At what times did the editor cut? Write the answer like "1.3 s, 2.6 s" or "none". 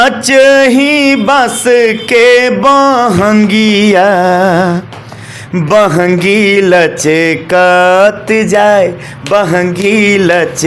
none